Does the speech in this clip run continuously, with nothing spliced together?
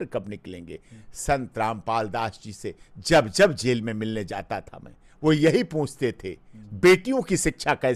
yes; 0 cuts

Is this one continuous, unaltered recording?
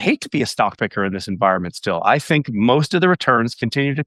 yes; 0 cuts

